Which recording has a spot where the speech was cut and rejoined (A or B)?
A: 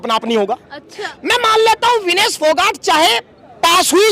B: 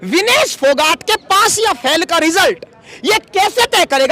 A